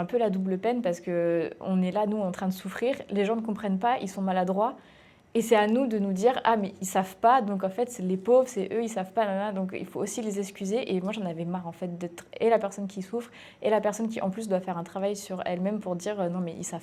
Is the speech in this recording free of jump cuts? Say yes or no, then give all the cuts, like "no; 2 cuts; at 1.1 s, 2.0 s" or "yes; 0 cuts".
yes; 0 cuts